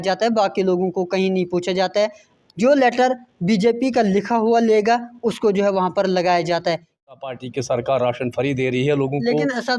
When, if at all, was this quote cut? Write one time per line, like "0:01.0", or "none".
0:07.1